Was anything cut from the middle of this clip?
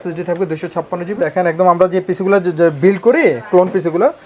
yes; 1 cut; at 1.2 s

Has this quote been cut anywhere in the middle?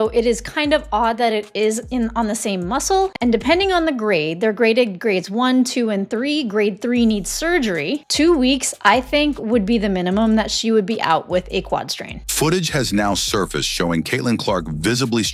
no; 0 cuts

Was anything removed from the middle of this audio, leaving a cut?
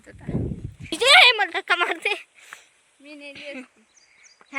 yes; 1 cut; at 0.9 s

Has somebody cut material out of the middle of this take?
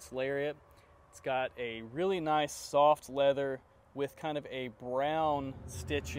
no; 0 cuts

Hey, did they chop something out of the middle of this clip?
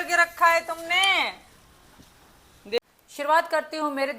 yes; 1 cut; at 2.8 s

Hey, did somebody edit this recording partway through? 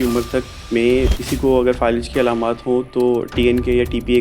yes; 1 cut; at 1.2 s

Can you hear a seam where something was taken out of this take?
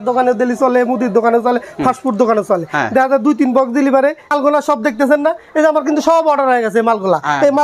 yes; 1 cut; at 4.3 s

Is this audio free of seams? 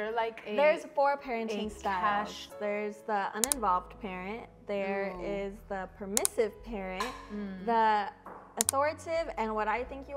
no; 1 cut; at 2.5 s

